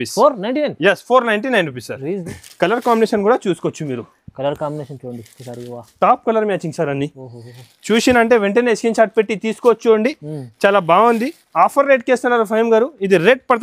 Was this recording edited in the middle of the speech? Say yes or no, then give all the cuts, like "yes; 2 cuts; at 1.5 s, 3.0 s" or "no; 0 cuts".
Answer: yes; 1 cut; at 2.2 s